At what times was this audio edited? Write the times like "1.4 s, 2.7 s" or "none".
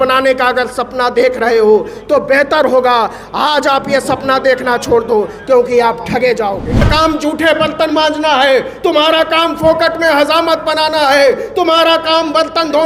6.8 s